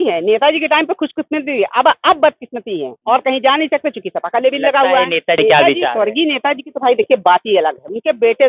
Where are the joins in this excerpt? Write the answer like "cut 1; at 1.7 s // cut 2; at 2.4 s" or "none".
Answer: cut 1; at 5.4 s